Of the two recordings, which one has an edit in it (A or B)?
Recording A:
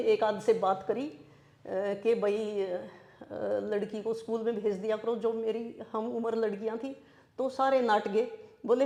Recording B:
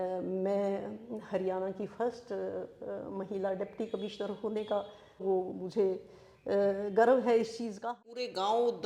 B